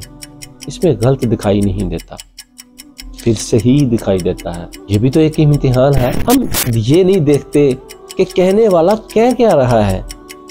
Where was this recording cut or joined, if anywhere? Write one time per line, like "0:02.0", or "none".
0:06.2

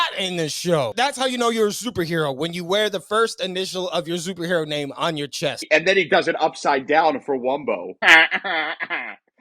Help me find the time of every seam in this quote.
0:00.9
0:05.6
0:07.9

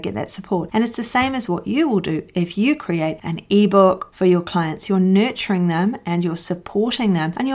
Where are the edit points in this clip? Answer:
0:04.1

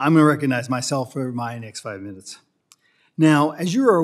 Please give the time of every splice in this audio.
none

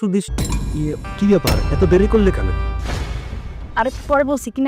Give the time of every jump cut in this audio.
0:01.0

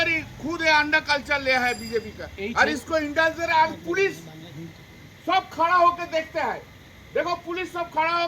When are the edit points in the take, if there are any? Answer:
none

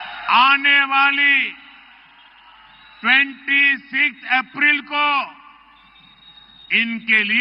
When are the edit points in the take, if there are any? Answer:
none

